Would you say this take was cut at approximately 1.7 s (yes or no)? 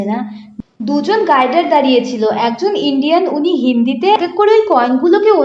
no